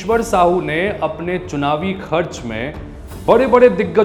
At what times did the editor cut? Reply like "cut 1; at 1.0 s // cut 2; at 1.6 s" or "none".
none